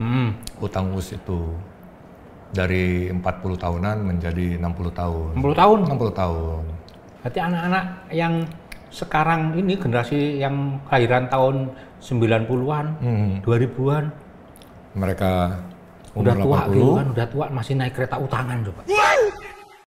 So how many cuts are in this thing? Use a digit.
1